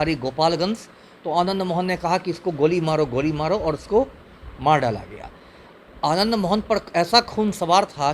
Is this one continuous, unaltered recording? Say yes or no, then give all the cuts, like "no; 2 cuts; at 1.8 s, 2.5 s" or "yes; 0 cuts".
yes; 0 cuts